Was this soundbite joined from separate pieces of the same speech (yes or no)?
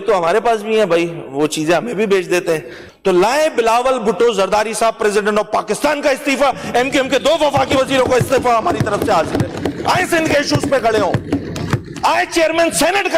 no